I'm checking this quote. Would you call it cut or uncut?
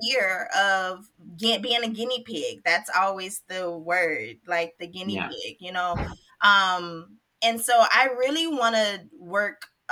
uncut